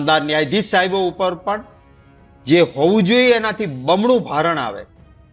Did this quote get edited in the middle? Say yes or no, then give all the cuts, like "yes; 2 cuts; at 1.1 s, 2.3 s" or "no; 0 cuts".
no; 0 cuts